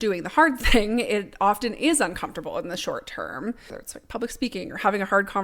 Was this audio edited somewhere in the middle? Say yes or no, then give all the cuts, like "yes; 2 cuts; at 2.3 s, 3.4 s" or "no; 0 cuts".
yes; 1 cut; at 3.8 s